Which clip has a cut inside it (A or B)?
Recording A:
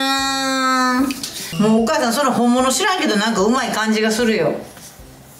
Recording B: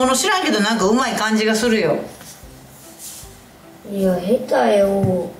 A